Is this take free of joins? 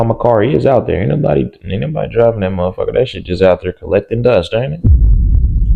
yes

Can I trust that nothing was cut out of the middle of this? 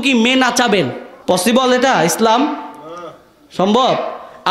no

